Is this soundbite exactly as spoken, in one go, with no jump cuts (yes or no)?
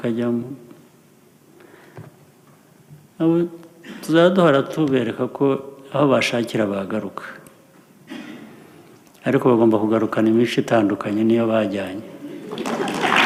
yes